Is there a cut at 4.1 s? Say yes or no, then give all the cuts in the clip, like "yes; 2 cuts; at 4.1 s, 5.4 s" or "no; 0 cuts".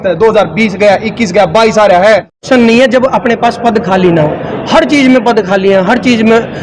no; 1 cut; at 2.4 s